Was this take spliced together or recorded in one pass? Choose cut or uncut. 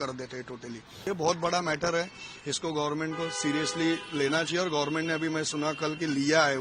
cut